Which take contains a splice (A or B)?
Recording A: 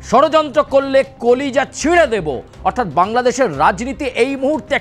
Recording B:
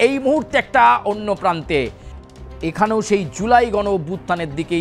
B